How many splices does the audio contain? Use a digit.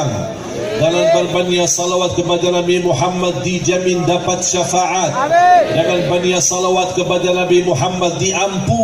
0